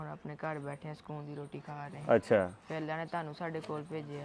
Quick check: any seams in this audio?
yes; 1 cut; at 1.9 s

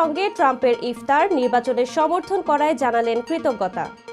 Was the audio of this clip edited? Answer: no; 0 cuts

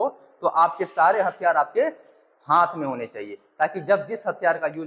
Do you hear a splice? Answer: no; 0 cuts

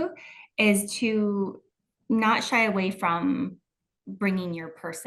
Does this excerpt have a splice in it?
no; 0 cuts

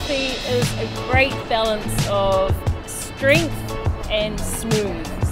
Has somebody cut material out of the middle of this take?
no; 0 cuts

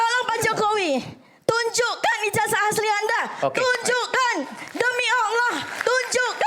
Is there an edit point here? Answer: no; 0 cuts

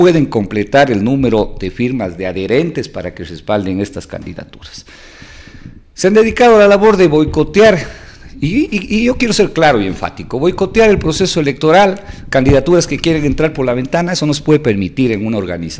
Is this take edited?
no; 0 cuts

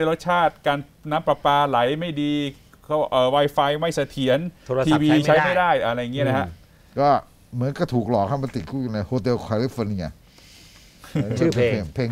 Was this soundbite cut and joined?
no; 0 cuts

